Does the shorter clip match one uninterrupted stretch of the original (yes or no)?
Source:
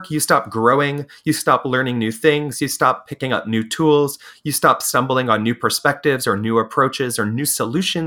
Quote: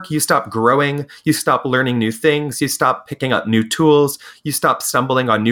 yes